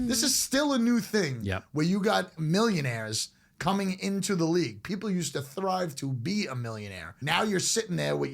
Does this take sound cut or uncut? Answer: cut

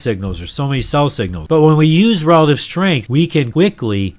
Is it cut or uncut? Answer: cut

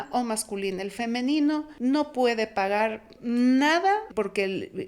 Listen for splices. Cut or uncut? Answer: cut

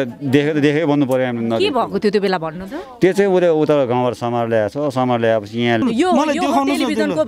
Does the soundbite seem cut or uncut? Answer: cut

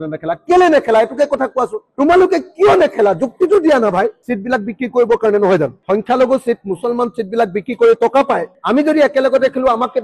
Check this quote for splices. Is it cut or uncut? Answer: cut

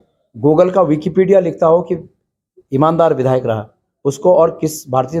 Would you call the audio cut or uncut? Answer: uncut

